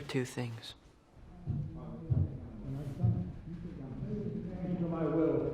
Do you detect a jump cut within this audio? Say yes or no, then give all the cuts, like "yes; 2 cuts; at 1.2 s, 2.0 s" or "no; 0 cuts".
no; 0 cuts